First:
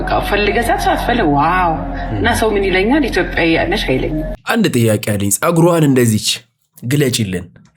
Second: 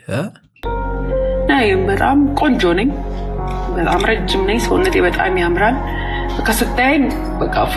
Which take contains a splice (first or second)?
first